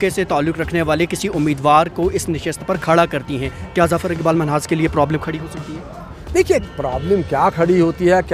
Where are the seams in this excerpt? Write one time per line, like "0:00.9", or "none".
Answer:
none